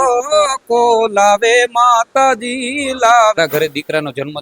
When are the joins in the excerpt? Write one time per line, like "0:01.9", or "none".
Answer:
0:03.4